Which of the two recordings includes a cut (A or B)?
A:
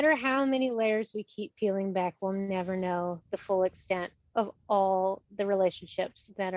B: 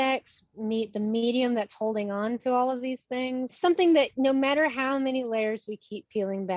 B